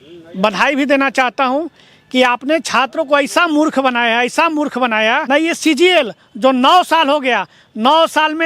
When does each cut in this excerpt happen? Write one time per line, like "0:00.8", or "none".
0:05.2